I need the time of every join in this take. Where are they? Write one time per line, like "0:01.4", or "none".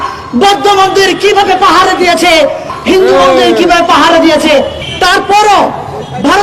0:02.7
0:04.8